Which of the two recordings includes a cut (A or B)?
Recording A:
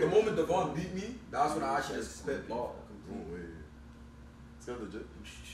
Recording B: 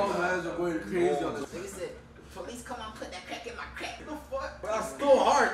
B